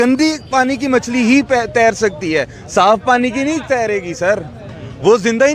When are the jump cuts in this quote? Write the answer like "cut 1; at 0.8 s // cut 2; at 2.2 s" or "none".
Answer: none